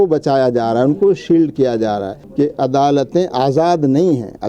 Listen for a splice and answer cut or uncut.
cut